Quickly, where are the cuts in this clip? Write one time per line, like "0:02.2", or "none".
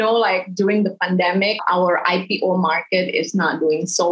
0:01.6